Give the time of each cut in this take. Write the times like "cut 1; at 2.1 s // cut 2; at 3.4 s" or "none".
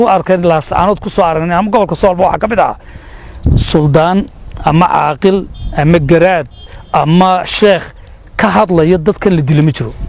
none